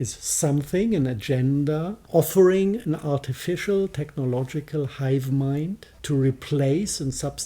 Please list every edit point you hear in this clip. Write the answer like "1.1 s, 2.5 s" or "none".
2.0 s, 5.9 s